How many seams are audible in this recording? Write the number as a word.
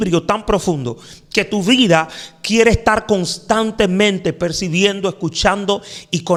zero